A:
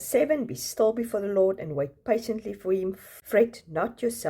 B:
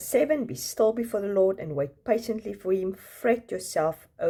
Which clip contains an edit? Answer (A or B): A